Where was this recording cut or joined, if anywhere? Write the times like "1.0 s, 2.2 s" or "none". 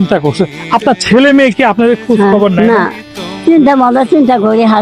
3.3 s